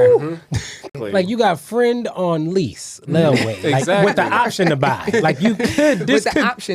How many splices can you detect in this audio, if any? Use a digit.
1